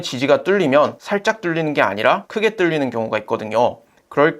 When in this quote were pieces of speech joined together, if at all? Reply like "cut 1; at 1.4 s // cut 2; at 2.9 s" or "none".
cut 1; at 1.0 s // cut 2; at 2.3 s